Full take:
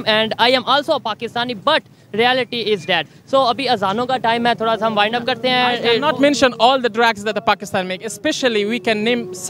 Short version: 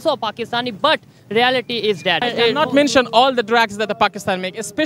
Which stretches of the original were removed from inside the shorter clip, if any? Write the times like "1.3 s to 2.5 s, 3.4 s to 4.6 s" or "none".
3.1 s to 5.7 s

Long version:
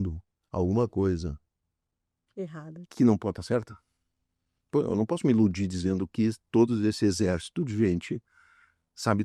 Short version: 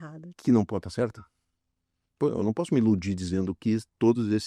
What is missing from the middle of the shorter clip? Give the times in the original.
none

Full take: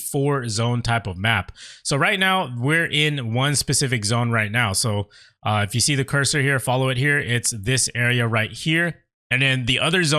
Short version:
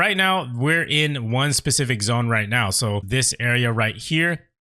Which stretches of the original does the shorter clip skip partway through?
5.1 s to 7.6 s

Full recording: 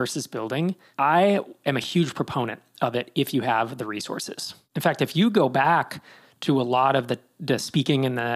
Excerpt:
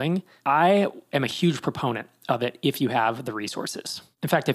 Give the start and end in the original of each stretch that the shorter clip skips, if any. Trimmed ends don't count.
none

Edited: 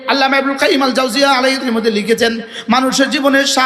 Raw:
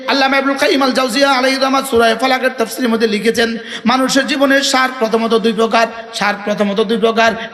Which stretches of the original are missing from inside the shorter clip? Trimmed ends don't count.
1.6 s to 2.7 s

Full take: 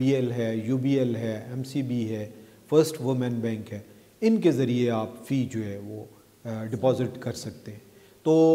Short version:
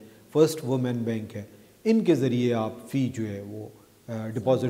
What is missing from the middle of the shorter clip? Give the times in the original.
none

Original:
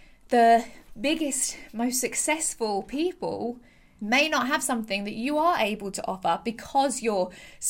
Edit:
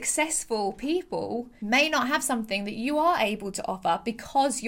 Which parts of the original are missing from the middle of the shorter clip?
3.6 s to 3.9 s

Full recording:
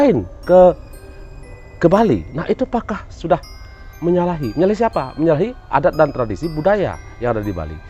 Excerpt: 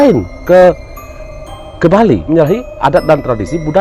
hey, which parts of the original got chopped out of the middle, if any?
2.2 s to 5.1 s

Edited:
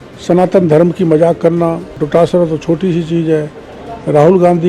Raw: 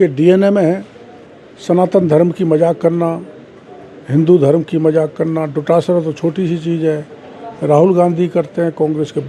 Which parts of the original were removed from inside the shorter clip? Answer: 3.4 s to 5.5 s

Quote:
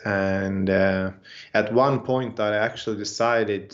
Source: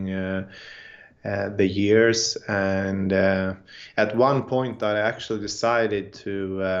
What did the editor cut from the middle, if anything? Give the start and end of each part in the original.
none

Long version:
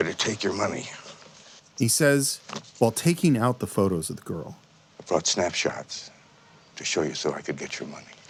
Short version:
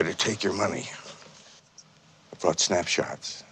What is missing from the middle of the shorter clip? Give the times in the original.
1.7 s to 4.4 s

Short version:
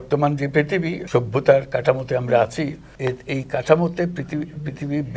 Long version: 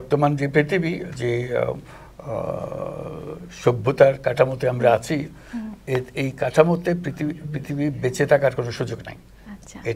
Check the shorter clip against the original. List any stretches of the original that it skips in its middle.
1.0 s to 3.5 s, 5.4 s to 5.7 s

